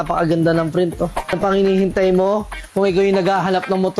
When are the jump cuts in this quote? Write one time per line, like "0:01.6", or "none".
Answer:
0:01.4